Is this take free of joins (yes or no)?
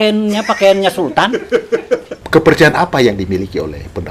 no